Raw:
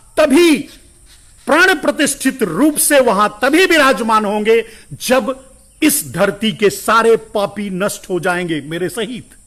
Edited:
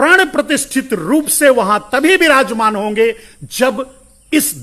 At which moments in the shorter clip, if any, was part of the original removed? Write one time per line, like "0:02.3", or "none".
none